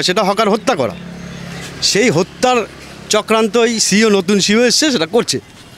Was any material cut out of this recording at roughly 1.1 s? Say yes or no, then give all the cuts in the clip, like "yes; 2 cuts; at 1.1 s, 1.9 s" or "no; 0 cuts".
no; 0 cuts